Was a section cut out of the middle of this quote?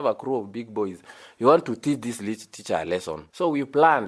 no; 0 cuts

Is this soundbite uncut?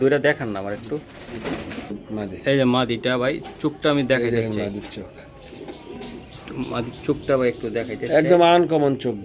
yes; 0 cuts

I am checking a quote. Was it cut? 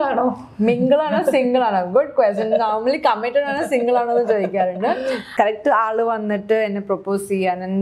yes; 1 cut; at 5.3 s

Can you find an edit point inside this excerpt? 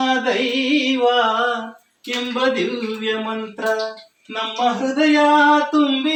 no; 0 cuts

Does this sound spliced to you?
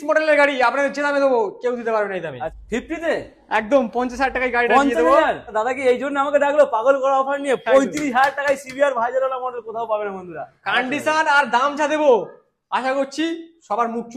yes; 3 cuts; at 2.5 s, 5.5 s, 10.5 s

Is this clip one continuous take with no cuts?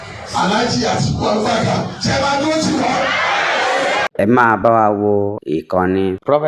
no; 1 cut; at 4.1 s

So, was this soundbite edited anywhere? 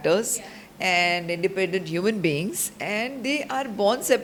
no; 0 cuts

